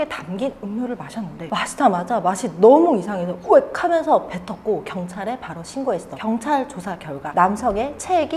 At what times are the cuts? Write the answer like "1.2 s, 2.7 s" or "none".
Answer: none